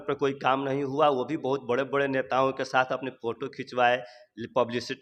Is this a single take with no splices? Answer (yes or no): yes